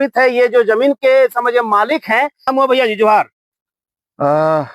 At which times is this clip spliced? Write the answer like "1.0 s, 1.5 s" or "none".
2.4 s